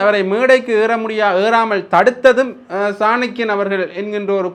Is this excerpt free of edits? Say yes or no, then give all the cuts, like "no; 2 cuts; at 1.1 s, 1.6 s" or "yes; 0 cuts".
yes; 0 cuts